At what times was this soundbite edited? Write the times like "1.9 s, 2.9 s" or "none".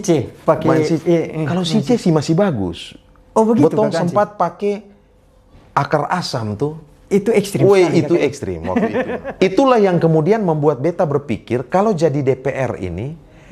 9.2 s